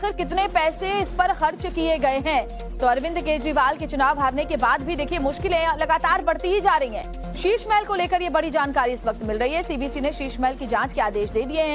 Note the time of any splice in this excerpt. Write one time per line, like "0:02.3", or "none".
0:05.9

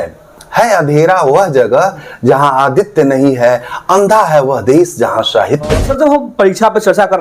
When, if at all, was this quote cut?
0:05.8

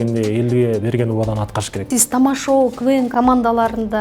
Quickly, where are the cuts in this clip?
0:01.9
0:03.1

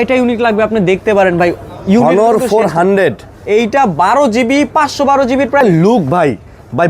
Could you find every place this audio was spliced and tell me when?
0:05.6

